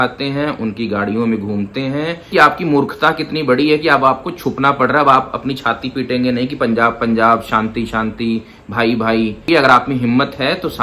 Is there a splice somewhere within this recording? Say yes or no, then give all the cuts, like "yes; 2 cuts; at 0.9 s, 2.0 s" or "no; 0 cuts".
yes; 2 cuts; at 2.3 s, 9.4 s